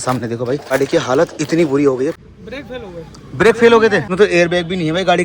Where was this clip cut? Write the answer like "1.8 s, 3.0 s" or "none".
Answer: 0.7 s, 2.2 s, 4.1 s